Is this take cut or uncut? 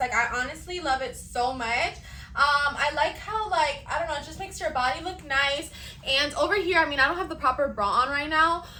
uncut